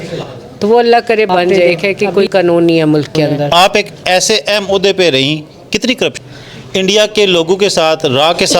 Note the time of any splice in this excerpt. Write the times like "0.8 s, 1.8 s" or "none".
1.8 s, 3.5 s, 6.2 s